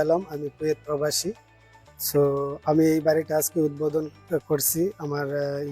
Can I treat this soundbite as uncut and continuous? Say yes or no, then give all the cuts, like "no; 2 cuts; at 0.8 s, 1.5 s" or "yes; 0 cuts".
yes; 0 cuts